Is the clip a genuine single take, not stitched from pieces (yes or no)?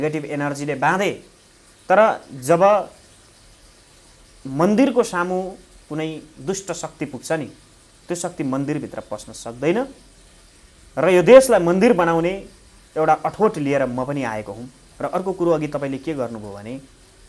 yes